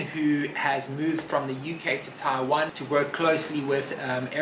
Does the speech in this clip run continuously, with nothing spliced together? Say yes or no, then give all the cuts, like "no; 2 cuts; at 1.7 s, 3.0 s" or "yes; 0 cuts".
no; 1 cut; at 2.8 s